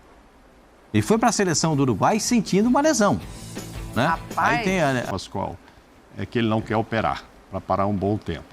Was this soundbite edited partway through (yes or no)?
yes